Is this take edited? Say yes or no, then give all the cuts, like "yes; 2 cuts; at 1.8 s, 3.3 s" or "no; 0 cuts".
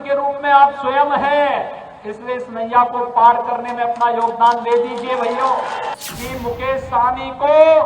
yes; 1 cut; at 5.9 s